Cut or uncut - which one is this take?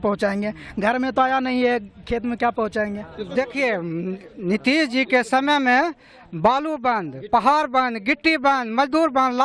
cut